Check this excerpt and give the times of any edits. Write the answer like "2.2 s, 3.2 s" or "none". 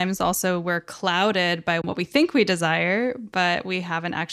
1.8 s